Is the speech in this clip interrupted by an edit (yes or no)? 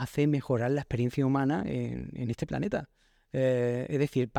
no